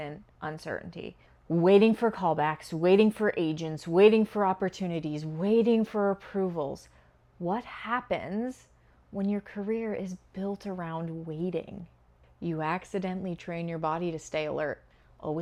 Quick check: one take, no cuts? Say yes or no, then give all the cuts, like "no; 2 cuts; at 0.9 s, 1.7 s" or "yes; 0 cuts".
yes; 0 cuts